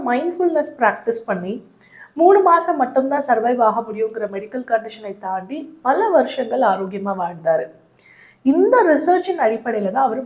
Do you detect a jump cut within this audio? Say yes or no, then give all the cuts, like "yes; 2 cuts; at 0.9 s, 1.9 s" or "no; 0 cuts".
no; 0 cuts